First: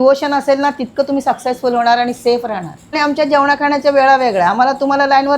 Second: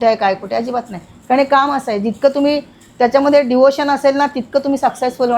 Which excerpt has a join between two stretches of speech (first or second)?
first